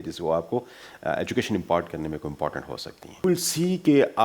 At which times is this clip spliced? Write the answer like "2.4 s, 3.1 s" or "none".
3.2 s